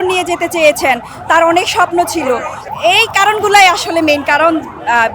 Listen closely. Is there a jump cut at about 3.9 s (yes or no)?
no